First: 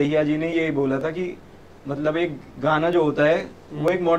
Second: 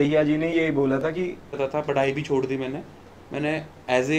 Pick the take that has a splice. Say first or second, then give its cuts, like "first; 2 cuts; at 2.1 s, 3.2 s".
second; 1 cut; at 1.6 s